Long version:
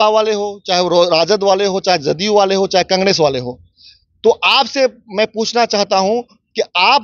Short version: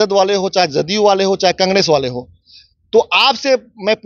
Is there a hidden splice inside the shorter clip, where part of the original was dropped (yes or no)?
no